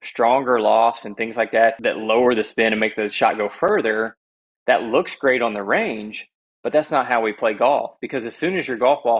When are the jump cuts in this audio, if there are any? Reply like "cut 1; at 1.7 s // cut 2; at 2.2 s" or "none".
cut 1; at 1.8 s

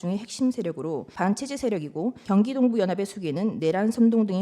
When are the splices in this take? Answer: cut 1; at 1.1 s // cut 2; at 2.2 s

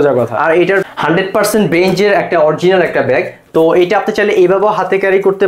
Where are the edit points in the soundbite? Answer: cut 1; at 0.9 s

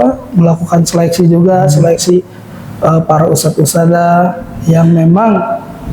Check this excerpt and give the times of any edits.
none

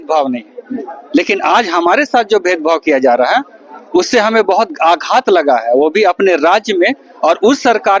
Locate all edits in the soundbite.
none

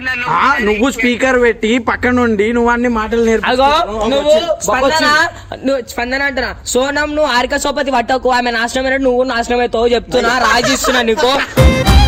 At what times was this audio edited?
none

